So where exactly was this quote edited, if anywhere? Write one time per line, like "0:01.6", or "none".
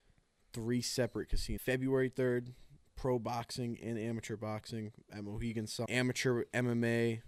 0:01.5
0:05.9